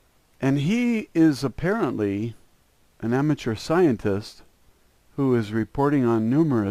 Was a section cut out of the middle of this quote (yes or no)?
no